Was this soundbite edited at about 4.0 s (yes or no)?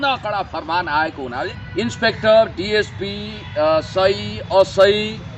no